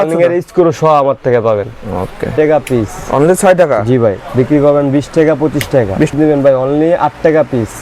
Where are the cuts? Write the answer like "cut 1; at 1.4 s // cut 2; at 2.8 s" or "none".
cut 1; at 2.3 s // cut 2; at 6.1 s

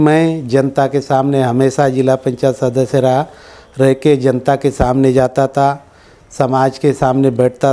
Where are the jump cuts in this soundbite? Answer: none

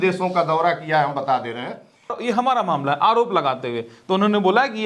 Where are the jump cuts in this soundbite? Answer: cut 1; at 2.1 s

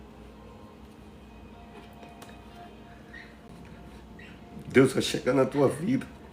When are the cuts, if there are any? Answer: cut 1; at 3.5 s

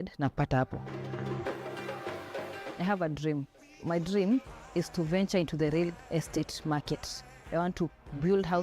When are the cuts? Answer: none

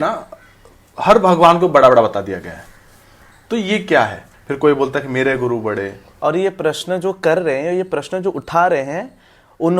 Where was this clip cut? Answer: cut 1; at 4.2 s // cut 2; at 6.0 s

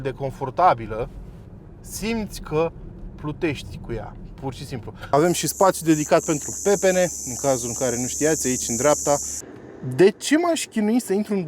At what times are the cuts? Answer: cut 1; at 5.1 s // cut 2; at 9.4 s

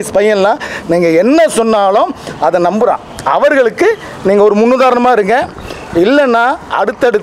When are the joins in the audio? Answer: none

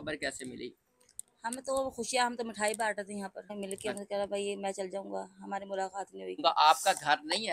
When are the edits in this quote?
cut 1; at 3.5 s // cut 2; at 6.4 s

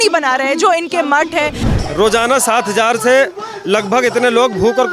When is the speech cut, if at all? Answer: cut 1; at 1.7 s

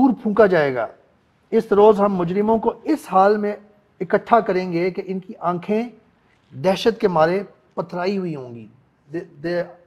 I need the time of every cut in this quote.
none

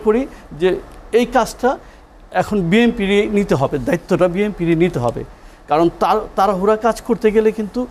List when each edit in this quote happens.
none

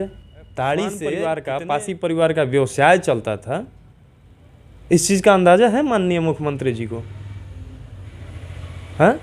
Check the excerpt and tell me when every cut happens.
cut 1; at 1.1 s

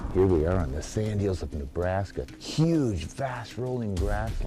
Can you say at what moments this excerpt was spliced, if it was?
cut 1; at 2.3 s

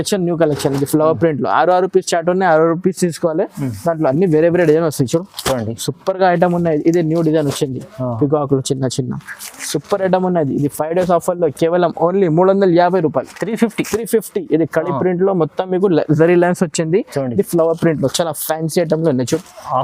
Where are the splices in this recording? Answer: none

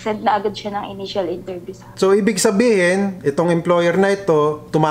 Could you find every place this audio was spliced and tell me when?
cut 1; at 1.8 s

